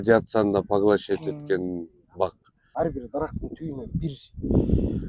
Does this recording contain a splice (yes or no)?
yes